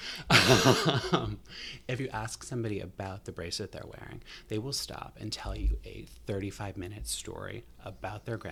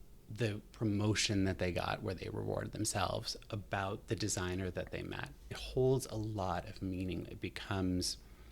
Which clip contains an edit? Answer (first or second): second